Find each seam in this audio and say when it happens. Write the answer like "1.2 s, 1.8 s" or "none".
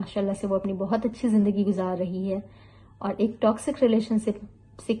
none